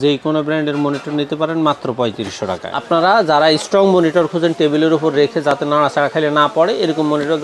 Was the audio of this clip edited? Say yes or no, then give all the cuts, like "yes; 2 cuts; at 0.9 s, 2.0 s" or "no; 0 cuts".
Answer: yes; 1 cut; at 2.7 s